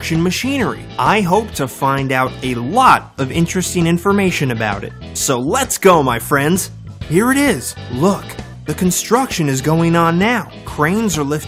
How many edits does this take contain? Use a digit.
1